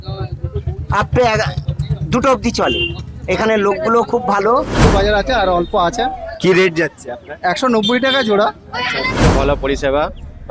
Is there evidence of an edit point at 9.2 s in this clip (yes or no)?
yes